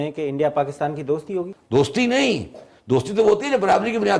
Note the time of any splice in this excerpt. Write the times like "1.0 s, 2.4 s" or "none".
1.5 s